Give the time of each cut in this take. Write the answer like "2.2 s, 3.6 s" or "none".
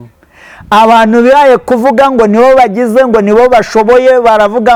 none

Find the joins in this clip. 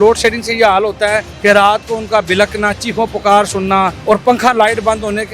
1.3 s, 4.0 s

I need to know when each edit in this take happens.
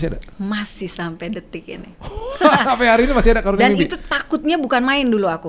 none

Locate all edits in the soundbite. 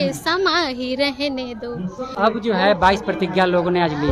2.1 s

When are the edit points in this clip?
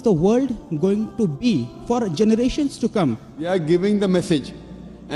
3.4 s

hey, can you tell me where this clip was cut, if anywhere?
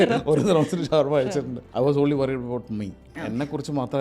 1.6 s

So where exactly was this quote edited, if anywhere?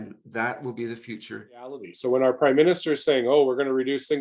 1.9 s

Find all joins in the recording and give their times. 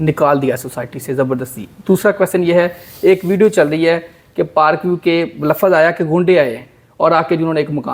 none

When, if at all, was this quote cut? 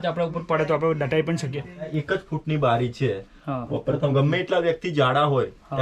1.9 s

